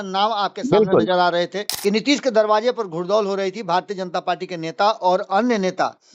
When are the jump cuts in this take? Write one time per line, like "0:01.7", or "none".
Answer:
0:01.6